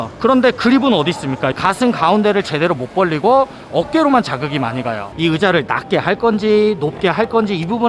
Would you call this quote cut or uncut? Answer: cut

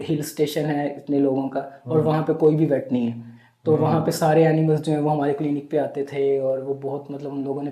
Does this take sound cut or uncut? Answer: uncut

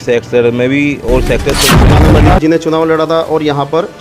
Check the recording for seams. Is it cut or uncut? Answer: cut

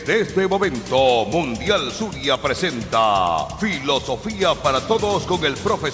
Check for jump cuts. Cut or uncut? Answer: uncut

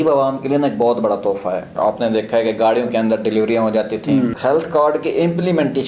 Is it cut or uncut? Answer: cut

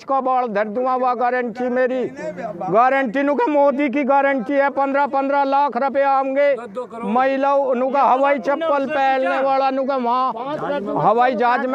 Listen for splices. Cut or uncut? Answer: uncut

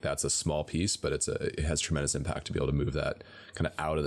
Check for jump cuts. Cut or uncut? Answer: uncut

